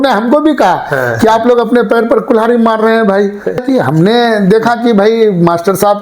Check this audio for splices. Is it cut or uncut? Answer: cut